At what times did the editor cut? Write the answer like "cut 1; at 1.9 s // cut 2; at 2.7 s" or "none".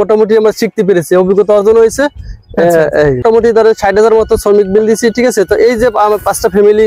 cut 1; at 3.2 s